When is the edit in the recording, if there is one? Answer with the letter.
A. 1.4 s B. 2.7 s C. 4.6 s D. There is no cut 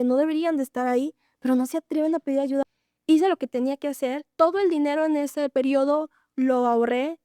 B